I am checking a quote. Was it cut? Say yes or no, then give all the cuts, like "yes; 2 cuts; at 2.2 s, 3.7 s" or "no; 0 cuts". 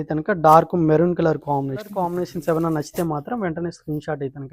yes; 1 cut; at 2.1 s